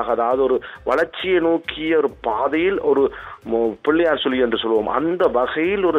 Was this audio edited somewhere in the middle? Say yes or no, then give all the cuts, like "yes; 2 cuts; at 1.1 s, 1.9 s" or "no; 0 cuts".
no; 0 cuts